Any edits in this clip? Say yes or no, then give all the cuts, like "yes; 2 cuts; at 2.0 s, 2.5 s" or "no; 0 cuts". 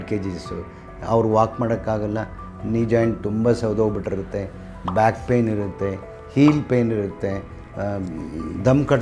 no; 0 cuts